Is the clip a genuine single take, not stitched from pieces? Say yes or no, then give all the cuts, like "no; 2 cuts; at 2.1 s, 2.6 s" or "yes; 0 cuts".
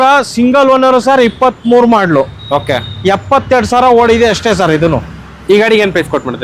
yes; 0 cuts